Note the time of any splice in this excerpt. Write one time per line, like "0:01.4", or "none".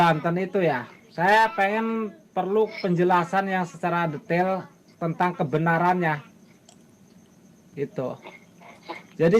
none